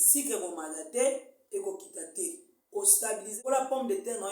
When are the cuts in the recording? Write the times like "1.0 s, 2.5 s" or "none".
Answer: 3.3 s